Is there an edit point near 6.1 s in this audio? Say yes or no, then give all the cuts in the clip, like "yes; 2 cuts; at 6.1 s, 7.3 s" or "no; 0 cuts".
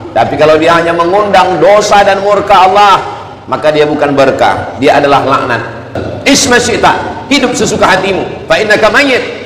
yes; 1 cut; at 6.1 s